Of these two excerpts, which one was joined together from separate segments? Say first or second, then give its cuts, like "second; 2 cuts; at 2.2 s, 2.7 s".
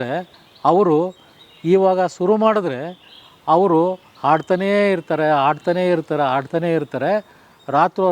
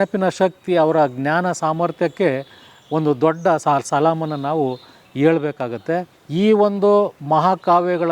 second; 2 cuts; at 3.6 s, 6.2 s